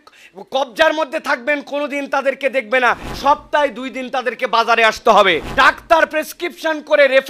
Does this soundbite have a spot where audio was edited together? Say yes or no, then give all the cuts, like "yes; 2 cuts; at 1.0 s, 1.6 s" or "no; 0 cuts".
yes; 2 cuts; at 3.1 s, 5.4 s